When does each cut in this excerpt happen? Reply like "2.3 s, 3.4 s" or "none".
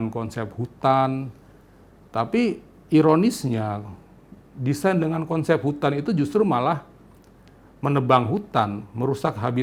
none